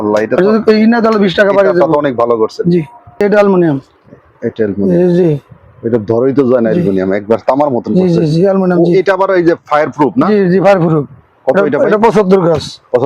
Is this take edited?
yes; 1 cut; at 3.2 s

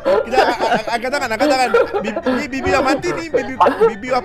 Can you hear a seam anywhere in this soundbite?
no; 0 cuts

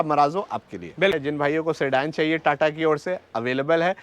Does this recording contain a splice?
yes; 1 cut; at 1.1 s

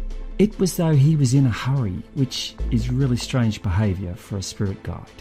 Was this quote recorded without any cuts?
no; 1 cut; at 3.5 s

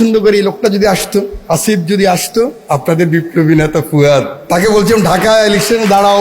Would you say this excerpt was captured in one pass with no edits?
no; 3 cuts; at 1.4 s, 2.6 s, 4.4 s

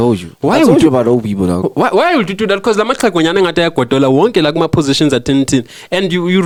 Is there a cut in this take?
no; 0 cuts

